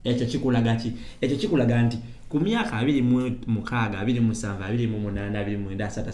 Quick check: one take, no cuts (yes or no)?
yes